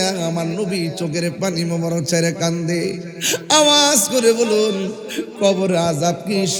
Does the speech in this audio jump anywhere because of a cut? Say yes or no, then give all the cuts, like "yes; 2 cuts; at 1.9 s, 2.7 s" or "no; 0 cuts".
no; 0 cuts